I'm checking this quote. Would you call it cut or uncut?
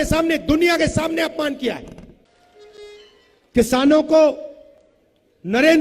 uncut